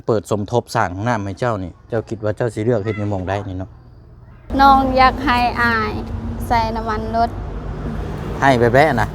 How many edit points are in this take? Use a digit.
1